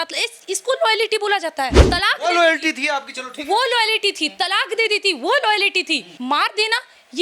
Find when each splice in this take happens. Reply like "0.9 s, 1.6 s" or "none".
1.8 s, 6.1 s